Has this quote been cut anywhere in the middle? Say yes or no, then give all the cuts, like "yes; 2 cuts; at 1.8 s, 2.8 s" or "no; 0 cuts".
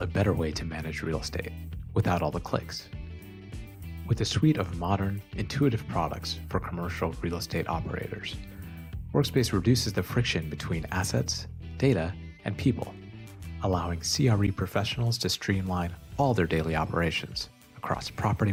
no; 0 cuts